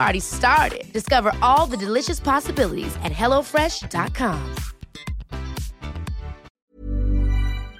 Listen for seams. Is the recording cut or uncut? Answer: cut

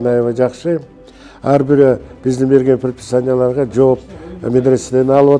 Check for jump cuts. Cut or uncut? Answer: uncut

